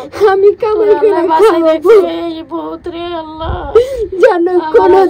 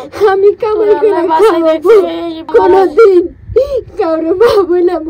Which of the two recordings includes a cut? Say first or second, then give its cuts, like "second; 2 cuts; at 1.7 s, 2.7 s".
second; 1 cut; at 2.5 s